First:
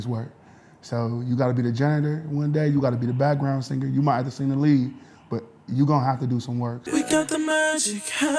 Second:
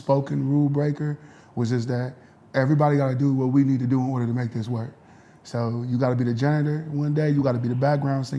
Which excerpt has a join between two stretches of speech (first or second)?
first